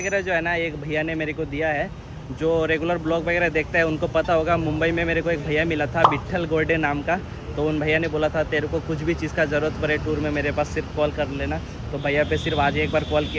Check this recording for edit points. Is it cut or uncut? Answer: uncut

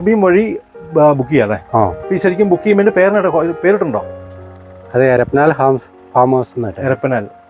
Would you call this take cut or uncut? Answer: uncut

